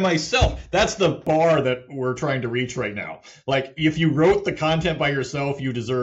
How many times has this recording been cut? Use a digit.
1